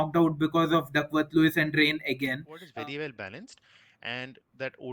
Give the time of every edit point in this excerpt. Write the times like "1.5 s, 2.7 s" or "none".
2.6 s